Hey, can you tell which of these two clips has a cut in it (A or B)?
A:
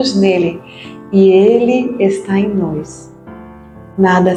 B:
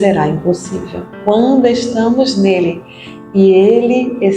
B